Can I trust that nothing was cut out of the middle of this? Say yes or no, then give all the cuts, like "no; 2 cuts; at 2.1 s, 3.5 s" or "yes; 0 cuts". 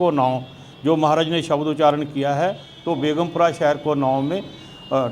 no; 1 cut; at 2.7 s